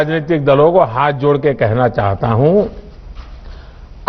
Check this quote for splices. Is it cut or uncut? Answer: uncut